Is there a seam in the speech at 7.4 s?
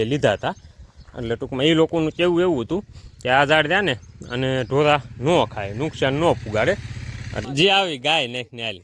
yes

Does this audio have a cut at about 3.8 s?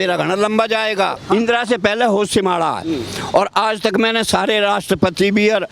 no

